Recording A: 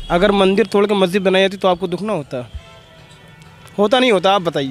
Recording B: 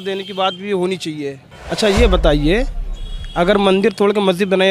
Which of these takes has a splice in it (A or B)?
B